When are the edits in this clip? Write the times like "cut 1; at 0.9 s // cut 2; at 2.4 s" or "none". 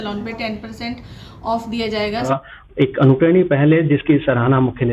cut 1; at 2.3 s